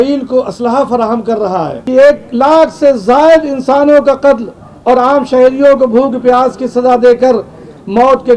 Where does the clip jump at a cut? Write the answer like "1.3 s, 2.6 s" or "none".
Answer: 1.8 s